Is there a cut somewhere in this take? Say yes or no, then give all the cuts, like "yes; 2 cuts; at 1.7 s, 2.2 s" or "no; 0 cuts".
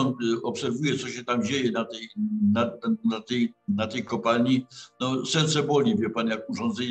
no; 0 cuts